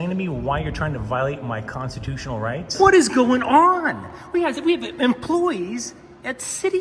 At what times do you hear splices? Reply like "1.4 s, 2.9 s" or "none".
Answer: 2.7 s

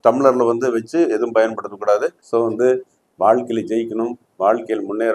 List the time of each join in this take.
2.2 s

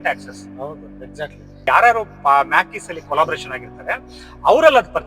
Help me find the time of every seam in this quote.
1.6 s

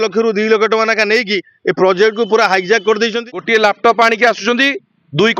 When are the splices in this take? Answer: 3.5 s

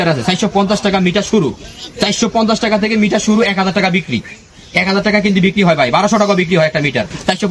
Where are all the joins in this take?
none

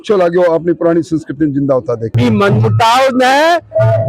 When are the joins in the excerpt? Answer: 2.1 s

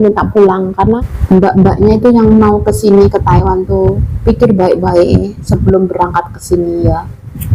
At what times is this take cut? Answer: 1.1 s

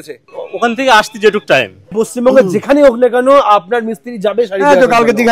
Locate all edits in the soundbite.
1.8 s

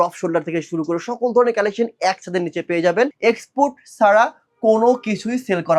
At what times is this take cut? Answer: 3.1 s

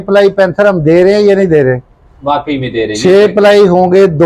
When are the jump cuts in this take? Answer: none

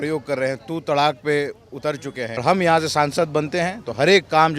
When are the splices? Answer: 2.4 s

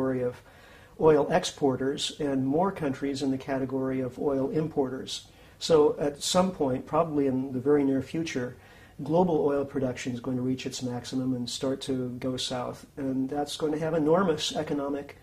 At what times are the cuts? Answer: 9.5 s

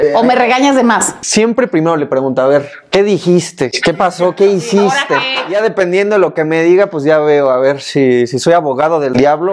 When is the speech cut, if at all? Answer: 1.2 s, 5.6 s

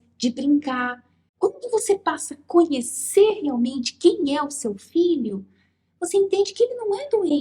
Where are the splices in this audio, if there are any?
1.2 s

